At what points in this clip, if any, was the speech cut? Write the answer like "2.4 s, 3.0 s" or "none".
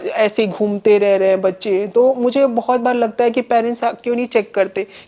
none